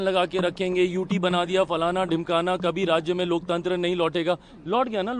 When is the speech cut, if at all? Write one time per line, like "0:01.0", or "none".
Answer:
none